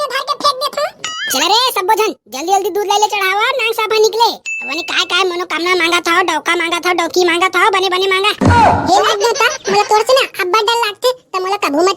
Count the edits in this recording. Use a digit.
1